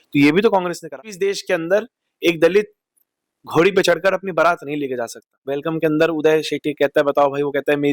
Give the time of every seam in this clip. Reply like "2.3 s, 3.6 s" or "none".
0.9 s, 5.6 s